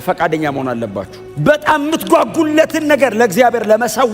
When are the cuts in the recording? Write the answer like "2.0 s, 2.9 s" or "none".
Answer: 1.2 s